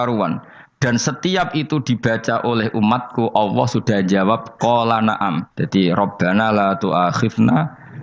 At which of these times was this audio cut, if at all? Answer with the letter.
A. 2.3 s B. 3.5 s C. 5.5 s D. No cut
C